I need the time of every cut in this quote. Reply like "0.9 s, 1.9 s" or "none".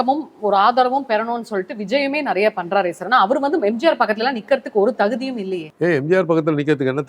5.6 s